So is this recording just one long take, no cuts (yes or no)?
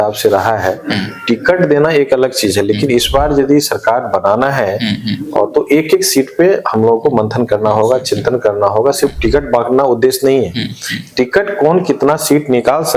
yes